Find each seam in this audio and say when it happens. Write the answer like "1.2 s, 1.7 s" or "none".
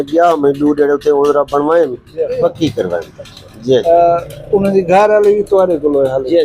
2.3 s, 3.8 s